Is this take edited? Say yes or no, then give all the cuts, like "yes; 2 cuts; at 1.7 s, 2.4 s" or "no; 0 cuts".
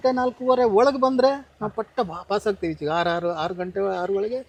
no; 0 cuts